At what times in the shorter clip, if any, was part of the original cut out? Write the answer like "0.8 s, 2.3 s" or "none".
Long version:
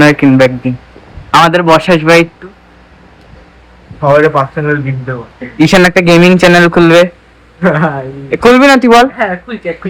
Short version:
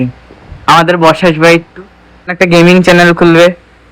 2.3 s